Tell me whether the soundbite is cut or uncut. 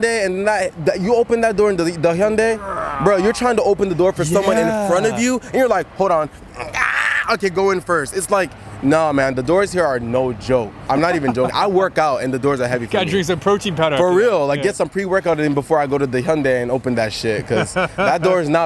uncut